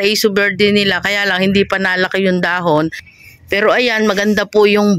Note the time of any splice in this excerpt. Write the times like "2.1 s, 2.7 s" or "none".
3.1 s